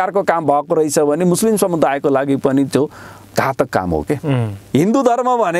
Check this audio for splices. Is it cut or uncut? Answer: cut